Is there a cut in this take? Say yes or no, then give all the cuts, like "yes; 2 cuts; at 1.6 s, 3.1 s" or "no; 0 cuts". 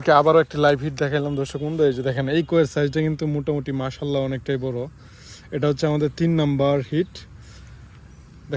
no; 0 cuts